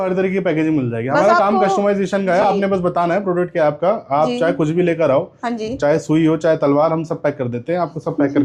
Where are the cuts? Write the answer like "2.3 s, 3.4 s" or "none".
none